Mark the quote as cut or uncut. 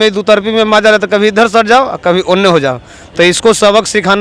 uncut